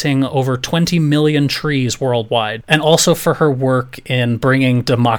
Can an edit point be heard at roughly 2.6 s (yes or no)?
yes